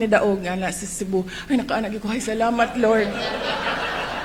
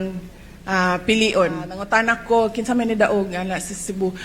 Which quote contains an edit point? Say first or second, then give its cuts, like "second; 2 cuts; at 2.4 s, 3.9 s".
second; 1 cut; at 1.7 s